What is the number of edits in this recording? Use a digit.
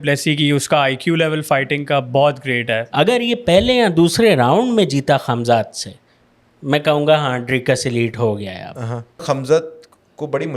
2